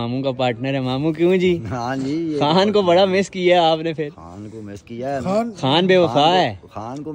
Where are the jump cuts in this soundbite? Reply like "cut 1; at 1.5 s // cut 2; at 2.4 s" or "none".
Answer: none